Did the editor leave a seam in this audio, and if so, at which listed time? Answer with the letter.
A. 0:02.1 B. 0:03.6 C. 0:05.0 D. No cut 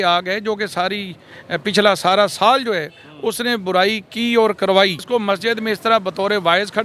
C